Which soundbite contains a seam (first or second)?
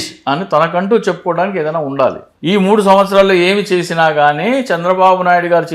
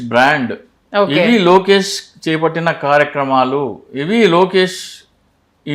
first